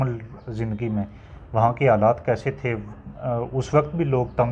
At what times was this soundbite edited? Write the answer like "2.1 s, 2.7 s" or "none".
none